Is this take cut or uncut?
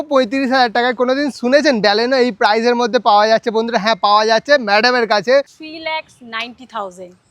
cut